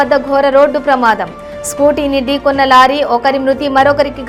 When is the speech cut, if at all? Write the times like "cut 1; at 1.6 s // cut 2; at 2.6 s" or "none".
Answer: none

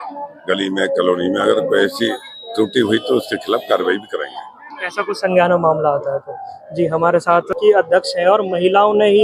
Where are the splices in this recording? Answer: cut 1; at 7.5 s

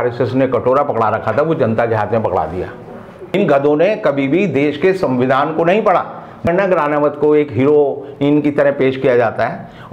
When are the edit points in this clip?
cut 1; at 3.4 s // cut 2; at 6.5 s

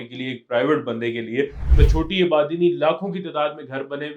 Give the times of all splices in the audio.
cut 1; at 1.6 s

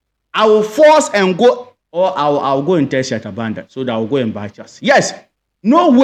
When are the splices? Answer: none

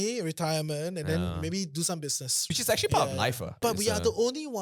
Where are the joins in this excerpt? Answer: cut 1; at 2.3 s // cut 2; at 3.6 s

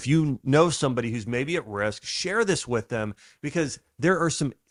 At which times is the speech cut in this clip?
none

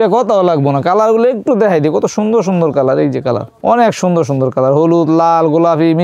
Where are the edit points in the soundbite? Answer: none

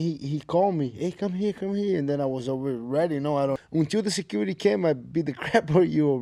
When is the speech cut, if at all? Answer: cut 1; at 3.6 s

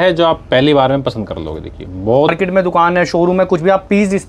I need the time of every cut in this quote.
cut 1; at 2.3 s

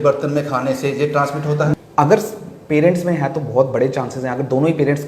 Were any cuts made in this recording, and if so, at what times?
cut 1; at 1.7 s

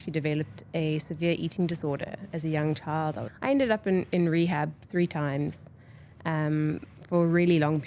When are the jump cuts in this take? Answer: cut 1; at 3.3 s

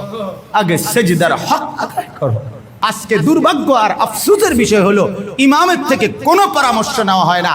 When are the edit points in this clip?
cut 1; at 2.7 s

